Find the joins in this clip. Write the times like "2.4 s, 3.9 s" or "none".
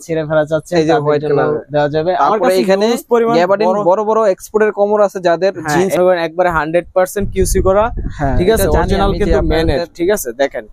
6.0 s